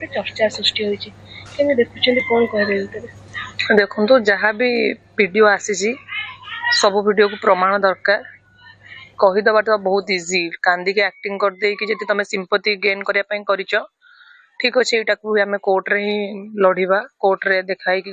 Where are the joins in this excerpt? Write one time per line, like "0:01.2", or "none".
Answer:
none